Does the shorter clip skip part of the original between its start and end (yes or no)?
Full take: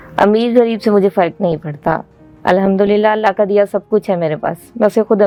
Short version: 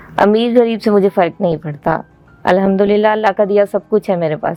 no